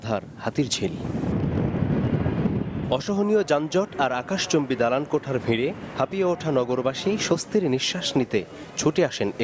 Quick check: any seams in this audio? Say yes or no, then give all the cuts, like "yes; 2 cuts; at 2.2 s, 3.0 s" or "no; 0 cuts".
no; 0 cuts